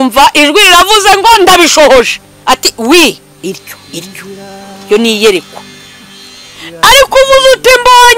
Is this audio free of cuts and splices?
yes; 0 cuts

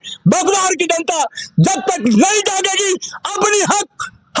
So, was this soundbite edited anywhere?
no; 0 cuts

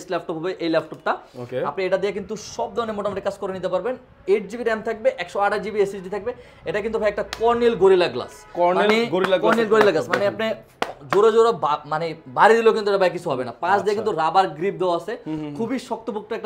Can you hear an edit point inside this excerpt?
no; 0 cuts

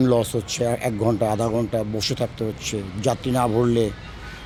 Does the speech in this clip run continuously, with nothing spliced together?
yes; 0 cuts

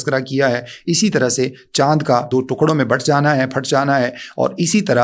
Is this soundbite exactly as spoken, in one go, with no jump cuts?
no; 1 cut; at 2.3 s

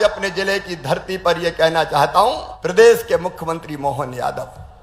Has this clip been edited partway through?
yes; 1 cut; at 2.5 s

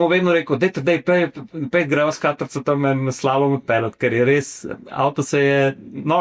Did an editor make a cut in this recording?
no; 0 cuts

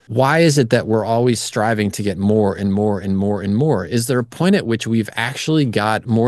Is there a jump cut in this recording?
no; 0 cuts

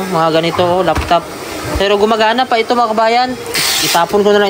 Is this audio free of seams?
no; 1 cut; at 3.6 s

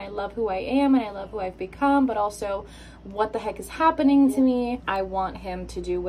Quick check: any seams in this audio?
yes; 1 cut; at 4.8 s

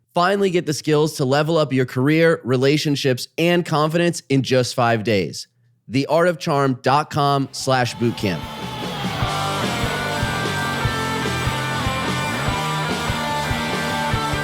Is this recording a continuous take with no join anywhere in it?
no; 1 cut; at 8.5 s

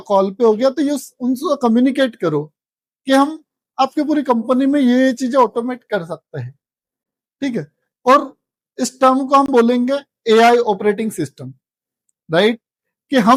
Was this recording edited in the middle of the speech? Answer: no; 0 cuts

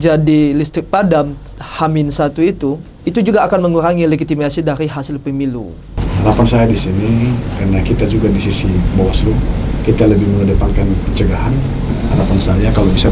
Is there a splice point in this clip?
yes; 2 cuts; at 2.9 s, 6.0 s

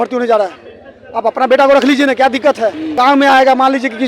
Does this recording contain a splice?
yes; 1 cut; at 2.9 s

